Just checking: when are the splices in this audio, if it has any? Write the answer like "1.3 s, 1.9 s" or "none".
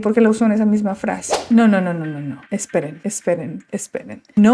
1.4 s